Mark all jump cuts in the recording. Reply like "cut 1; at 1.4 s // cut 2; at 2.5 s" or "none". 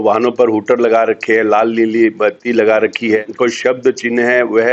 cut 1; at 3.3 s